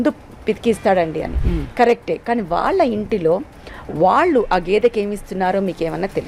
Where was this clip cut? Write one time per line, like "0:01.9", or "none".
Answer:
none